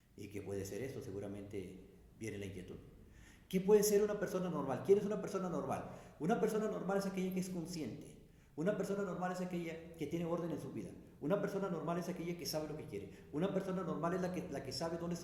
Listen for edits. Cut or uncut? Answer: uncut